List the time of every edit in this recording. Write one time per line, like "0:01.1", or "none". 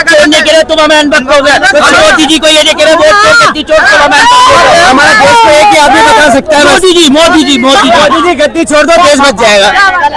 none